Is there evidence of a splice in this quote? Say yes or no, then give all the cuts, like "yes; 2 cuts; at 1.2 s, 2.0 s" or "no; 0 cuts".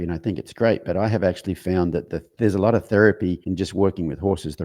yes; 2 cuts; at 2.2 s, 3.4 s